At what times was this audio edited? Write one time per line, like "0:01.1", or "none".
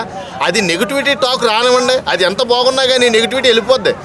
none